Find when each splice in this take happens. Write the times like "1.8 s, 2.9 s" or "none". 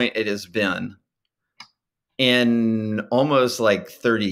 none

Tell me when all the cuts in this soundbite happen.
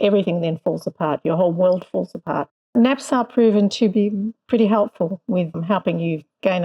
2.7 s, 3.7 s, 5.6 s

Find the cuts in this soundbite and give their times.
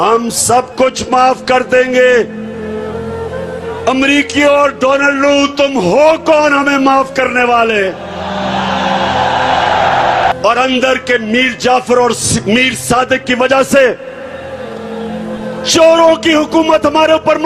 2.4 s, 3.9 s, 10.3 s

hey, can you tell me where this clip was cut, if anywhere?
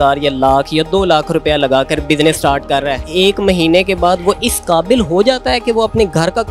3.0 s

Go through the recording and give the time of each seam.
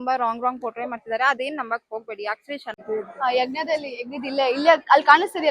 2.8 s

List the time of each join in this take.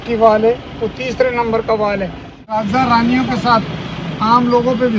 2.6 s

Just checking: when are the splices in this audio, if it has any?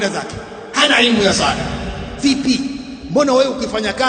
2.9 s

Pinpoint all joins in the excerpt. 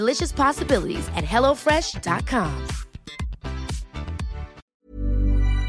4.6 s

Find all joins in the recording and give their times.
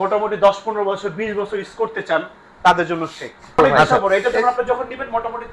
3.6 s

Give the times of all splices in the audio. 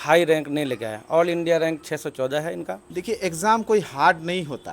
2.8 s

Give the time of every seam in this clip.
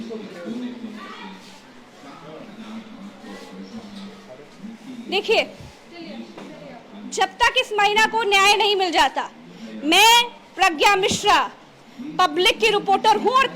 none

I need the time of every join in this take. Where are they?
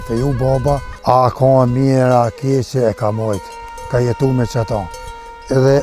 0.9 s

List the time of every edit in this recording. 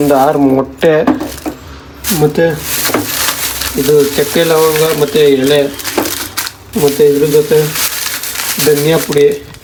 none

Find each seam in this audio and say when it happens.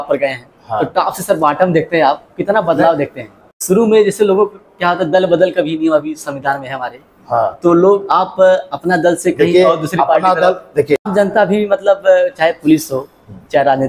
3.5 s, 11.1 s

